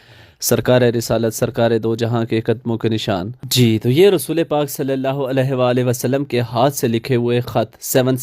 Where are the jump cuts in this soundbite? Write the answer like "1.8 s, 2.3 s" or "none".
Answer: 3.4 s